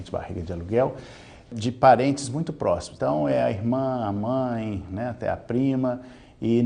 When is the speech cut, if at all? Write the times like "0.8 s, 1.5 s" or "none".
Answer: 1.5 s, 2.9 s